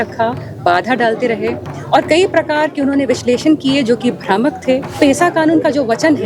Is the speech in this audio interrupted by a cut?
yes; 1 cut; at 5.0 s

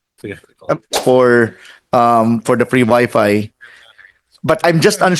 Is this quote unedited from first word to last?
no; 1 cut; at 0.9 s

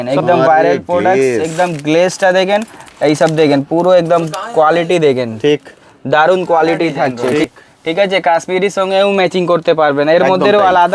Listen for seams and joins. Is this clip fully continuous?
no; 1 cut; at 7.2 s

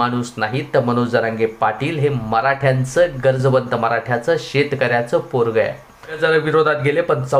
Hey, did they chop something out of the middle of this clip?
yes; 1 cut; at 6.2 s

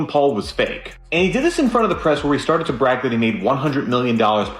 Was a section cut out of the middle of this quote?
no; 0 cuts

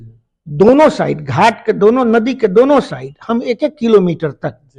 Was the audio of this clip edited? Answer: no; 0 cuts

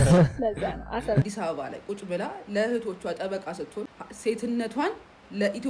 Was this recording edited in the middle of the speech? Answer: yes; 1 cut; at 1.2 s

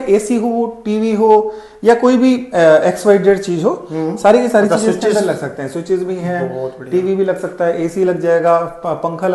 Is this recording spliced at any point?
no; 0 cuts

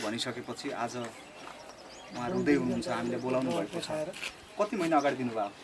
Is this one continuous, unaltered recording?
yes; 0 cuts

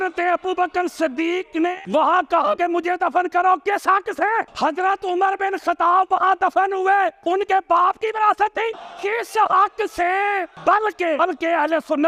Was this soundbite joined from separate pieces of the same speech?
no; 0 cuts

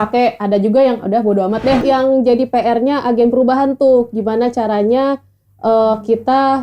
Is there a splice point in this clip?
yes; 1 cut; at 1.8 s

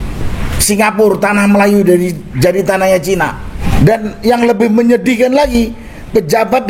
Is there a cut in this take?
yes; 1 cut; at 3.6 s

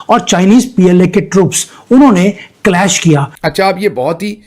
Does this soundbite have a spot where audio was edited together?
yes; 1 cut; at 3.3 s

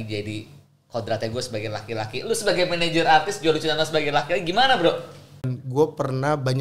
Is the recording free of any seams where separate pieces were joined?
no; 1 cut; at 5.6 s

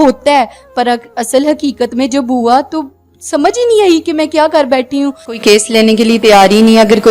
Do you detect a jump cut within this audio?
yes; 1 cut; at 5.4 s

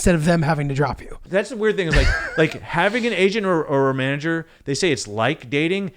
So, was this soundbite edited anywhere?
yes; 1 cut; at 1.2 s

